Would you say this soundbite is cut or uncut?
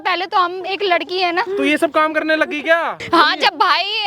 cut